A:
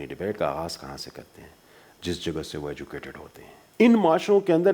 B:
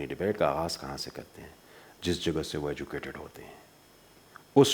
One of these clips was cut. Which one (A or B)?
A